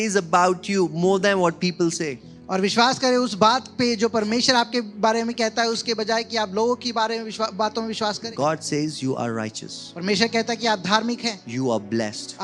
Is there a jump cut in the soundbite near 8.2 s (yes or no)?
yes